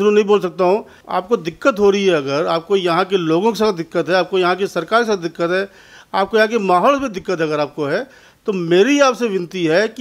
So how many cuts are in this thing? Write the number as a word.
one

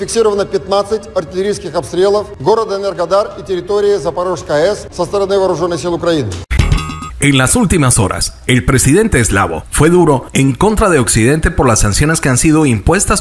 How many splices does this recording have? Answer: three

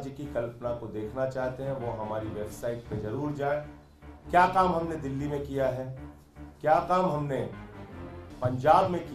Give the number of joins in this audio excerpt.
zero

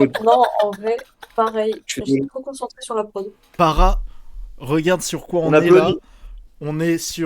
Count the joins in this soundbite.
one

